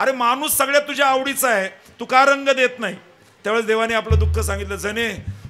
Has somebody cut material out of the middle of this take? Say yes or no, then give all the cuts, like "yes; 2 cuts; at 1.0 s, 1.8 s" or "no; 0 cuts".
no; 0 cuts